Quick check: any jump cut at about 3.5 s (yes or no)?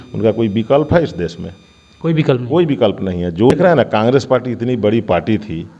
yes